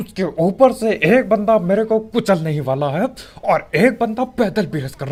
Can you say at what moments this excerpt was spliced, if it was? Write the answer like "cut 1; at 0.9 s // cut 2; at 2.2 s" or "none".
none